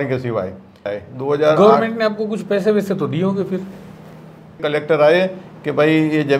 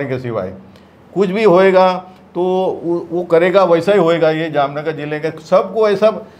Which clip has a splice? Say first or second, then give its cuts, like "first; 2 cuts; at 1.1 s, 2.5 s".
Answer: first; 2 cuts; at 1.0 s, 4.6 s